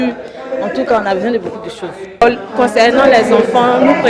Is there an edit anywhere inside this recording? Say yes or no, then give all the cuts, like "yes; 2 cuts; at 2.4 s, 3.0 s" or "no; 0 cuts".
yes; 1 cut; at 2.2 s